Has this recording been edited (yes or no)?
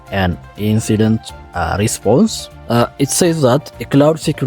yes